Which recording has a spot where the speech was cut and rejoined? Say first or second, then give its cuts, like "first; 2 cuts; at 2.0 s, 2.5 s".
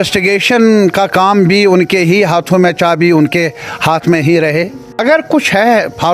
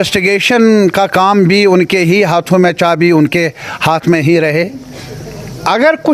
first; 1 cut; at 5.0 s